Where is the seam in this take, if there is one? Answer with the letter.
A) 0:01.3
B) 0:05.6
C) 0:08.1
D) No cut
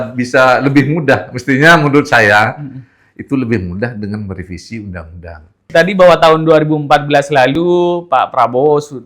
B